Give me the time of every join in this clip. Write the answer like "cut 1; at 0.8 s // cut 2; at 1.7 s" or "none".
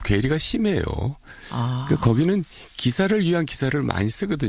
cut 1; at 2.5 s